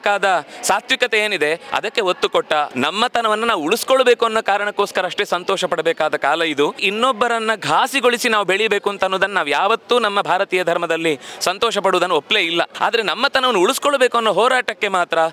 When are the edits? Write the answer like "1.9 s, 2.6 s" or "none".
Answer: 2.7 s, 6.8 s, 12.7 s